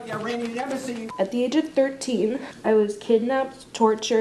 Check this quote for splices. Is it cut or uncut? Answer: cut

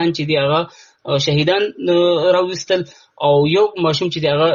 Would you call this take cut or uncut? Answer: uncut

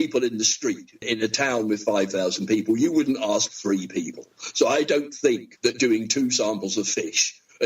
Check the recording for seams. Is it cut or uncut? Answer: cut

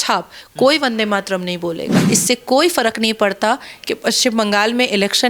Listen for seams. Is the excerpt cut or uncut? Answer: cut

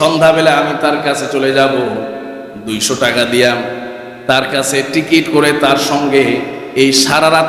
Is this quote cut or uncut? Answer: uncut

